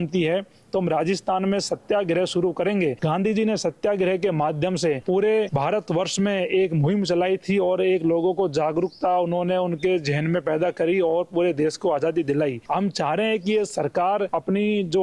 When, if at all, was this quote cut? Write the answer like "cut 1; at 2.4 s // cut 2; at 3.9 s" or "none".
none